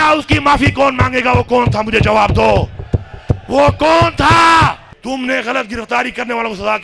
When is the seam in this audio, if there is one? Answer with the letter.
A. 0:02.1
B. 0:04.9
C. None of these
B